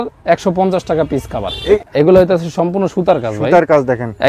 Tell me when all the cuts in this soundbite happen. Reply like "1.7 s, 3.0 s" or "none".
1.8 s